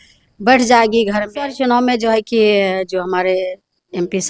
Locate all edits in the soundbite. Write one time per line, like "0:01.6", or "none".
0:01.5